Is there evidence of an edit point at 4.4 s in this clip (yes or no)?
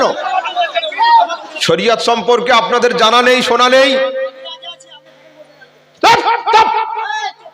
no